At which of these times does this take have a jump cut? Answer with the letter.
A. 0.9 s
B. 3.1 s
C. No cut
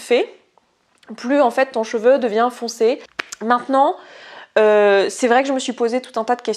B